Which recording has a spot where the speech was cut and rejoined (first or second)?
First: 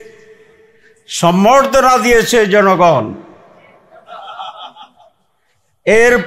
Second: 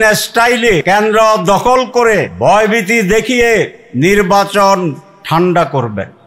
second